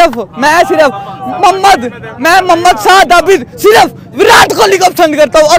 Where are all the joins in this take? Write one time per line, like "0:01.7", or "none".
none